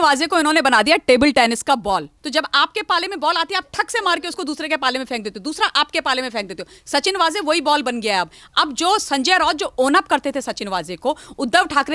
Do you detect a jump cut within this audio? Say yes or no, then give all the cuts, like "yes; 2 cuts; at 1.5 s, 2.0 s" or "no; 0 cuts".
yes; 1 cut; at 2.1 s